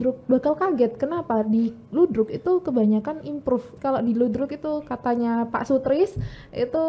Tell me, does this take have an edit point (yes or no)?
yes